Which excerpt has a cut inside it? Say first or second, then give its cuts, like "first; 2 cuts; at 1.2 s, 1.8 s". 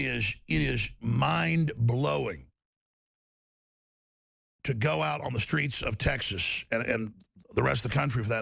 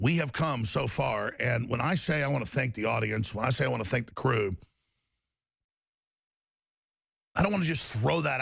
second; 1 cut; at 1.4 s